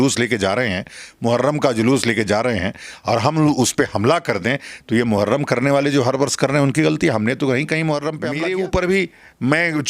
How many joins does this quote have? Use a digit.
1